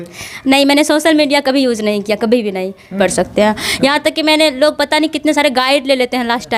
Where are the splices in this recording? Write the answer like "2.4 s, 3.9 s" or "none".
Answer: 3.0 s